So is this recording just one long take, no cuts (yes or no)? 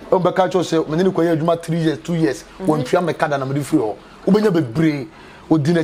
yes